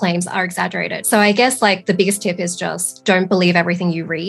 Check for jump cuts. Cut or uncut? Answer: cut